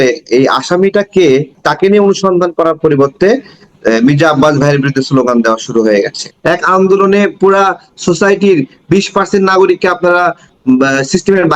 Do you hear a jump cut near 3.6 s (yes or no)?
no